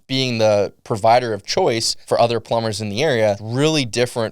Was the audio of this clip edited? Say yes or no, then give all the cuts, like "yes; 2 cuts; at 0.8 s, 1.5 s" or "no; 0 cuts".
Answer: yes; 2 cuts; at 1.9 s, 3.4 s